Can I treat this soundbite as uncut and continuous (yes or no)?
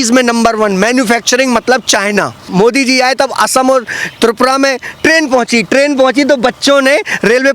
no